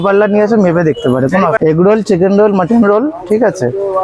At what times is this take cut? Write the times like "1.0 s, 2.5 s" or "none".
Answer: 1.6 s